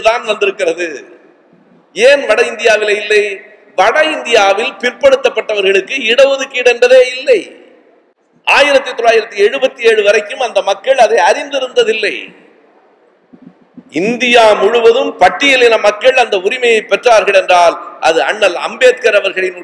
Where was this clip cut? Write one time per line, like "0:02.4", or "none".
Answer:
none